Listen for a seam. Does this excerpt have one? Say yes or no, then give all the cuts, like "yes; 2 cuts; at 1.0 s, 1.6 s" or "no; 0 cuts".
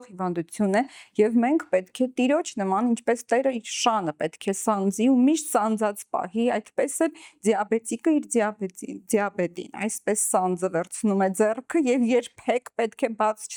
no; 0 cuts